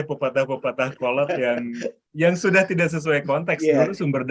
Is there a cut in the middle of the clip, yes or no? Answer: no